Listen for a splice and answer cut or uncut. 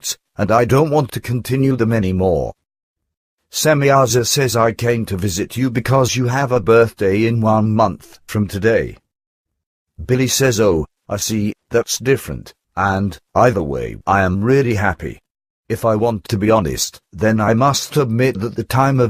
cut